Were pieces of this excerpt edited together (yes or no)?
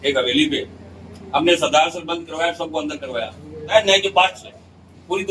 yes